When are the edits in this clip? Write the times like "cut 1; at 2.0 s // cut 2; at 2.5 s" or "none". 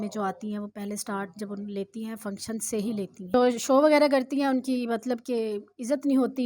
cut 1; at 3.3 s